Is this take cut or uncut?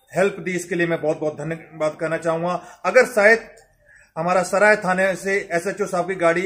uncut